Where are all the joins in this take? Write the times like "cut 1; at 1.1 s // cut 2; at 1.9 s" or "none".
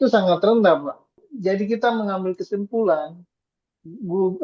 cut 1; at 1.2 s